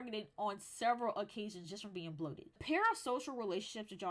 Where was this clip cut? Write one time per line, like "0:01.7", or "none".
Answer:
0:02.6

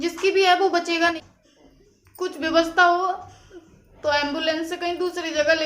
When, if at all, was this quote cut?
0:01.1

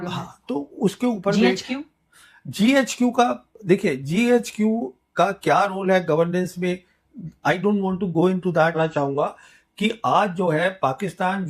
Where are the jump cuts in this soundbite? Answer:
0:08.7

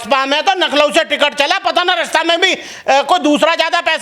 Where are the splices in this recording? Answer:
none

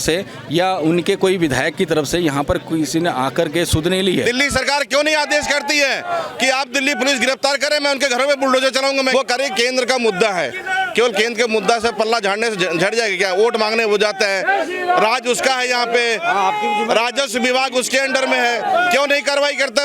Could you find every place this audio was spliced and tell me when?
0:04.2
0:09.1

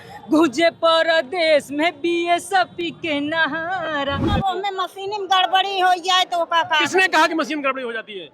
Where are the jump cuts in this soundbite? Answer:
0:04.2

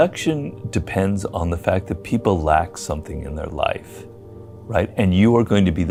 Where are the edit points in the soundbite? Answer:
none

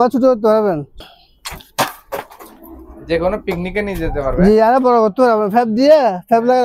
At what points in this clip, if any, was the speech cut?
0:01.0

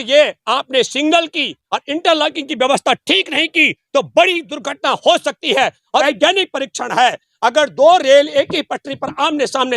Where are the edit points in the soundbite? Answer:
0:06.0

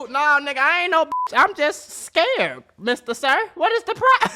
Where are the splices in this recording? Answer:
none

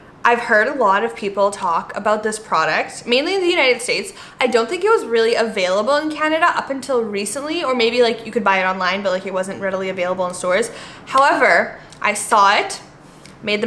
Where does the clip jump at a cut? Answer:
none

